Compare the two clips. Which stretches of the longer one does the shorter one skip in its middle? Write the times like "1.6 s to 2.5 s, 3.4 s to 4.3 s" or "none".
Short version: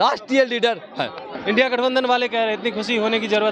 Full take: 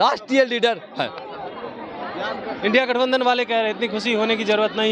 1.3 s to 2.5 s